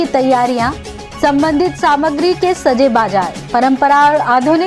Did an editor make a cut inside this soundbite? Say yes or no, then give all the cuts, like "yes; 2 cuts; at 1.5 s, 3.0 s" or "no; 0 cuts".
no; 0 cuts